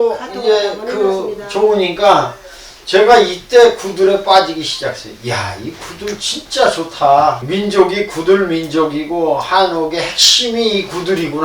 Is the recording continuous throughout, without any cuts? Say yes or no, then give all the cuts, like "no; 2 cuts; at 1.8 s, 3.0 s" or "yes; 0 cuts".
no; 1 cut; at 7.4 s